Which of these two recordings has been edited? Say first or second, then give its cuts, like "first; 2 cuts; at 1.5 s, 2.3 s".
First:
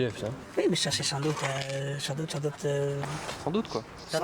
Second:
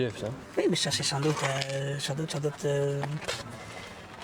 first; 1 cut; at 3.2 s